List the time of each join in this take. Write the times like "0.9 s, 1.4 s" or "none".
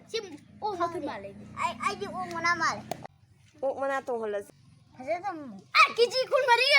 3.0 s, 4.6 s